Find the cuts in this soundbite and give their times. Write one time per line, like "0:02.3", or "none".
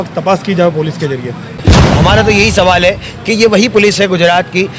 0:01.5